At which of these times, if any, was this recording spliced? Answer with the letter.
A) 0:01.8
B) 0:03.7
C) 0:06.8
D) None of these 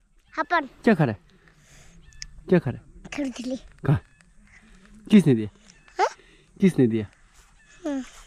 D